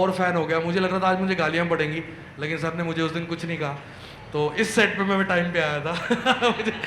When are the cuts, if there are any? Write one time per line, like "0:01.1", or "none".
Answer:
none